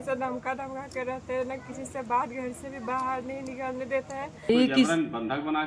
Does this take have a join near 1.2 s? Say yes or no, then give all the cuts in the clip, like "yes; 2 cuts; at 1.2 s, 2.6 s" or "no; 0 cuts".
no; 1 cut; at 4.5 s